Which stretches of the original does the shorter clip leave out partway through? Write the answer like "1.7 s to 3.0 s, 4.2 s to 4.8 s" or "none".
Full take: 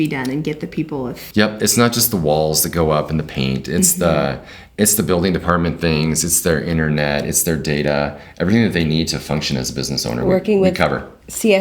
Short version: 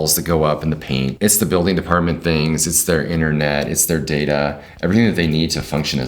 3.6 s to 4.7 s

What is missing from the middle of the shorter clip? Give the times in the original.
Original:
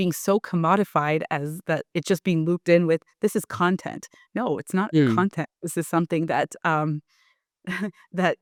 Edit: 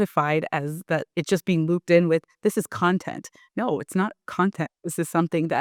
none

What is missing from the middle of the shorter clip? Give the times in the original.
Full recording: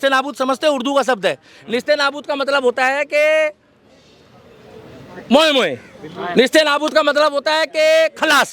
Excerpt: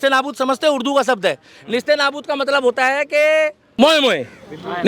3.6 s to 5.1 s

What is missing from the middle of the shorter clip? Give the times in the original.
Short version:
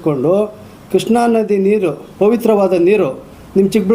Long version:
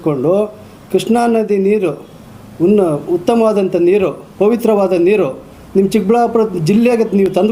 2.0 s to 4.2 s

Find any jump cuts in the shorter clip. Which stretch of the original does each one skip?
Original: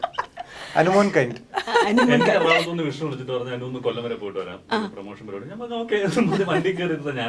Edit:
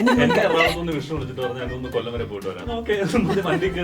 4.5 s to 5.6 s

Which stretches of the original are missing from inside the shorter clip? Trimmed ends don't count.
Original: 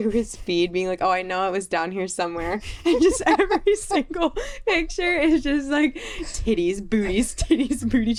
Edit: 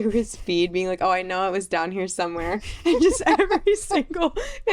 none

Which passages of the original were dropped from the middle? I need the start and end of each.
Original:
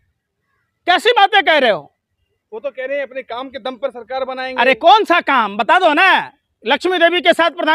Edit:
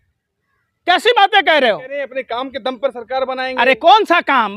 2.0 s to 2.9 s

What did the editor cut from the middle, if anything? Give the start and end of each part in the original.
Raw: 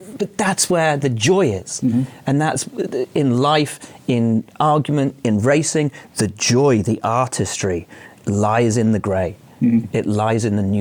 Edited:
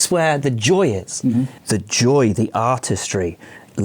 2.1 s to 6.1 s

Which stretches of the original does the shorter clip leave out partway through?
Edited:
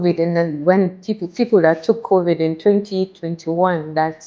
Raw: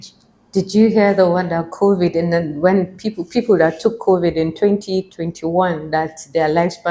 none

